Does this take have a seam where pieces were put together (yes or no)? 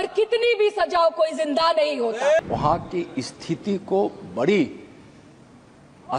yes